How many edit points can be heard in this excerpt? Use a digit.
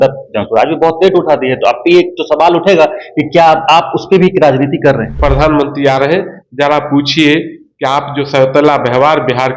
1